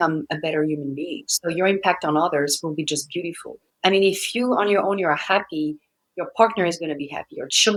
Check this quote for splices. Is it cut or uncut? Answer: uncut